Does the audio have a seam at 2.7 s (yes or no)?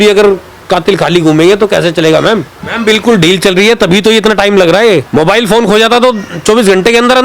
yes